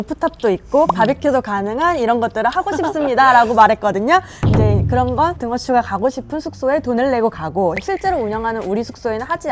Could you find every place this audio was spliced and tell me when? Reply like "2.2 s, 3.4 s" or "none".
none